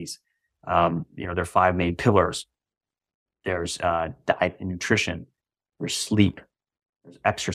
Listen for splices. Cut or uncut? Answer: uncut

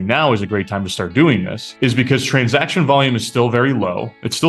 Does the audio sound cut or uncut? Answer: cut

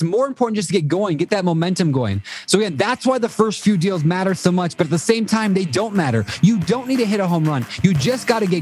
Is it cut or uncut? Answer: uncut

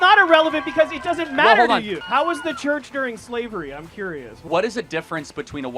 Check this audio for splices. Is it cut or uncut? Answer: cut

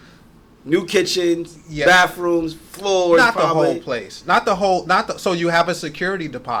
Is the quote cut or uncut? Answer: uncut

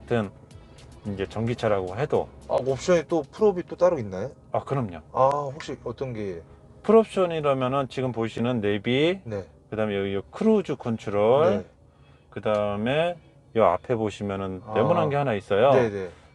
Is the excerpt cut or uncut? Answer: uncut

